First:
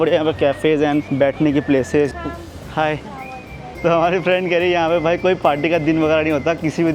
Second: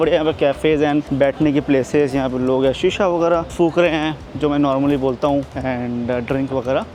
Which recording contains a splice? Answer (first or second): first